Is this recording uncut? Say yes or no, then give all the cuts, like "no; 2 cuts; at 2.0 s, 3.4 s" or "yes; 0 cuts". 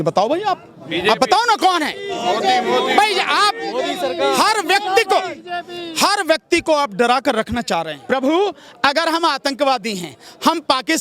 no; 1 cut; at 7.9 s